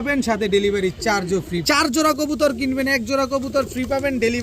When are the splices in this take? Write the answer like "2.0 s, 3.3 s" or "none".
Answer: 1.6 s